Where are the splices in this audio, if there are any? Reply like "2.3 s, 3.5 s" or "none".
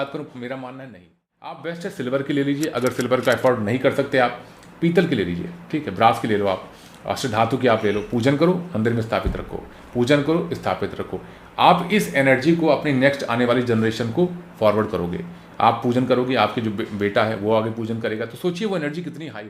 1.6 s